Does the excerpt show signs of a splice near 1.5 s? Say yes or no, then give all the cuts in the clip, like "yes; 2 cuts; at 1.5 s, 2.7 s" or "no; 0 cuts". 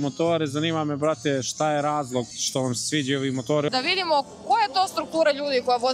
no; 1 cut; at 3.7 s